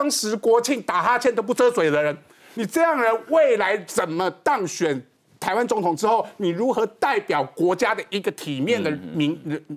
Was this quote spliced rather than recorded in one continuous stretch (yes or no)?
no